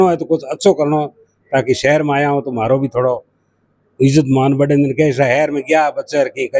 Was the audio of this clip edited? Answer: no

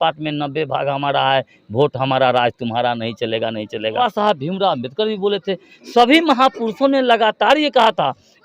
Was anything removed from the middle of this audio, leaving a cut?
yes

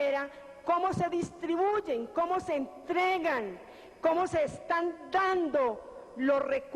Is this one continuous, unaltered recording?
no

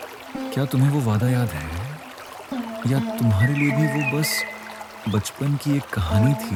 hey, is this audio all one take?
yes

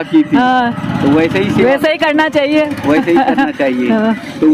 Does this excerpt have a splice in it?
no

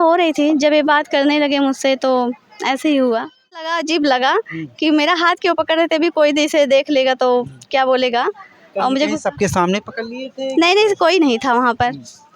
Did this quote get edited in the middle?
yes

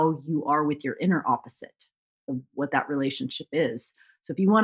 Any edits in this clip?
no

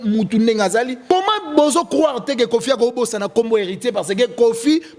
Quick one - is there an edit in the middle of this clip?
yes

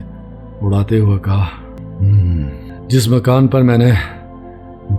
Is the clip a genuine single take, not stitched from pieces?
no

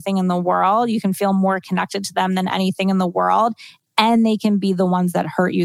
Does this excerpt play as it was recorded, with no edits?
yes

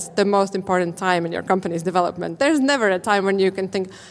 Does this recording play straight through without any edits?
no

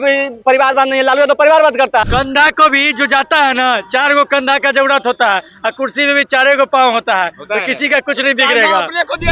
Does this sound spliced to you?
yes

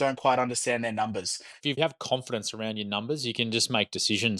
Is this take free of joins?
no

